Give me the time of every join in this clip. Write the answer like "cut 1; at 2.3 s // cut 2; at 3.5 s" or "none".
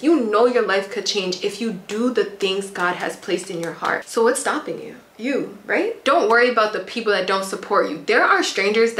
none